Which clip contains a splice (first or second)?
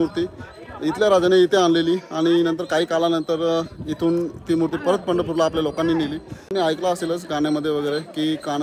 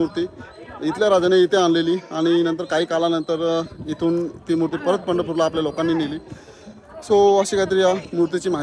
first